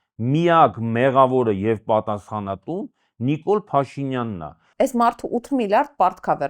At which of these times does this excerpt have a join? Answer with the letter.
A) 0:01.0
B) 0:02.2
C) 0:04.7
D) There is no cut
C